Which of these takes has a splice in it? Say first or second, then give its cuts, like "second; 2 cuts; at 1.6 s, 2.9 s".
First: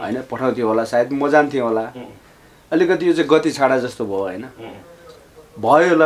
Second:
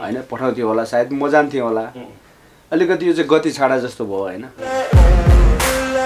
second; 1 cut; at 4.5 s